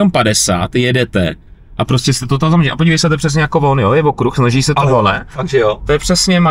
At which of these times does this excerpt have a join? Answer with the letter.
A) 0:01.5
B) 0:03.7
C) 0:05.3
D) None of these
D